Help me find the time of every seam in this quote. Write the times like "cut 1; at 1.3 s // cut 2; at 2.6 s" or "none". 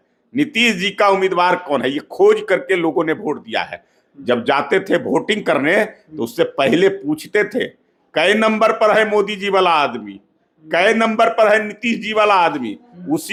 none